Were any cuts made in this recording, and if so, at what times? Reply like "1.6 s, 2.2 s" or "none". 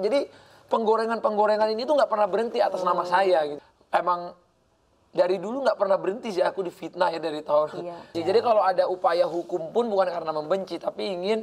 3.6 s, 8.1 s